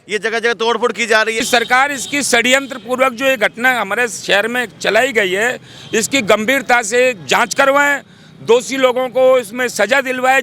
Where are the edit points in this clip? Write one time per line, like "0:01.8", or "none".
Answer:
0:01.4

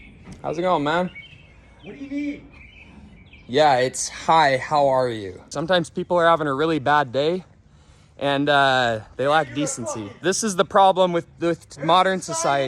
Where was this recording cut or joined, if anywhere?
0:05.4
0:10.1

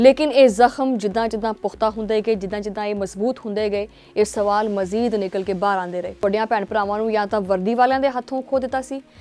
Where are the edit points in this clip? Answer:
0:06.2

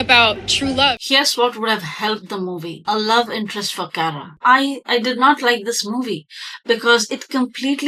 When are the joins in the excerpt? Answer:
0:01.0
0:04.3

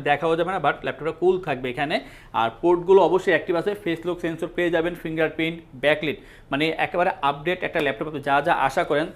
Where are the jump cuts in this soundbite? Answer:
none

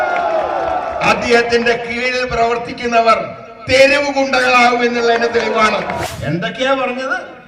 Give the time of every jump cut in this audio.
0:06.1

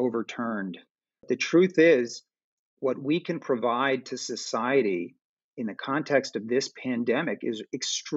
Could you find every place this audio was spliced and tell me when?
0:01.2

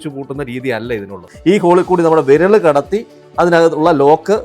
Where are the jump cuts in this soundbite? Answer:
0:01.3

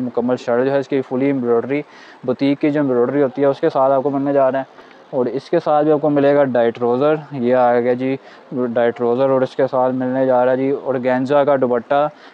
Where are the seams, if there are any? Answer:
none

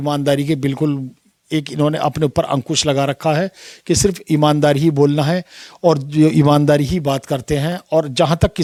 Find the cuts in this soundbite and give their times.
none

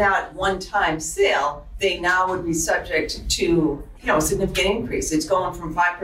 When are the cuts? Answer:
0:01.6
0:03.9

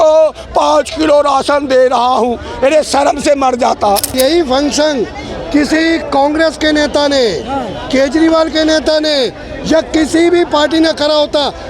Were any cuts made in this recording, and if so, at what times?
0:04.1

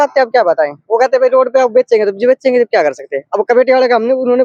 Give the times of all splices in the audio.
none

